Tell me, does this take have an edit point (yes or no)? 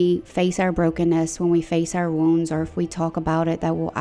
no